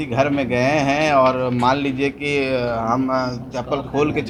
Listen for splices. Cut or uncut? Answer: uncut